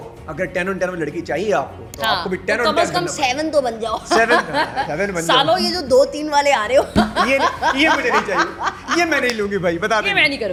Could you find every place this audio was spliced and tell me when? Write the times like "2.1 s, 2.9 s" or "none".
none